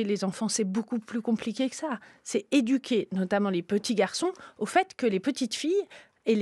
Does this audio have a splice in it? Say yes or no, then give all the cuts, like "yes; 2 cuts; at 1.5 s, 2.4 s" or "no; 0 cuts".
no; 0 cuts